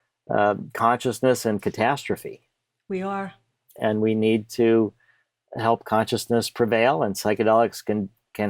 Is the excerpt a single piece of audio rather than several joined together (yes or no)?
yes